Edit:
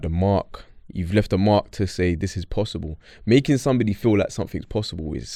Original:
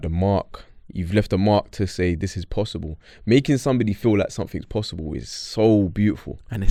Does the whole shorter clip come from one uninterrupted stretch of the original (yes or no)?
yes